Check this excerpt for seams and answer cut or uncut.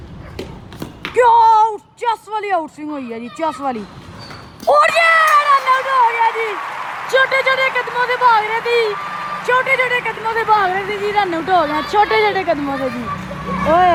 uncut